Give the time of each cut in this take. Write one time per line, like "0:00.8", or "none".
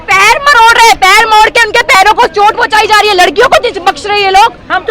none